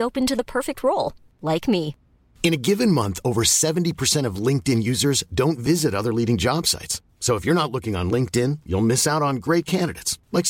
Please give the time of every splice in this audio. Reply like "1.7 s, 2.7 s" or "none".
none